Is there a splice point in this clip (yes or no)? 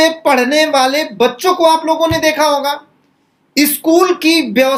no